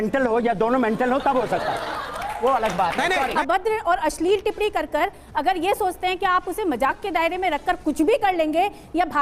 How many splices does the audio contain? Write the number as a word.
one